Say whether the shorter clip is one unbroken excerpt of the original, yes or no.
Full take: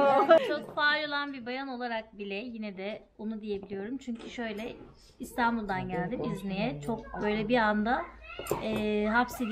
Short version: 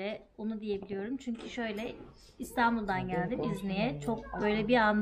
yes